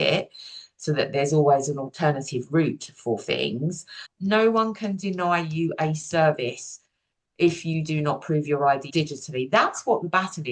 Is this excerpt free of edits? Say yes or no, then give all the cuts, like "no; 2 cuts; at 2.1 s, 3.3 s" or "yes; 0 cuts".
no; 2 cuts; at 4.1 s, 8.9 s